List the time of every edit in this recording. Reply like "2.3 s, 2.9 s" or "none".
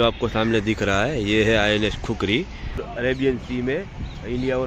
2.8 s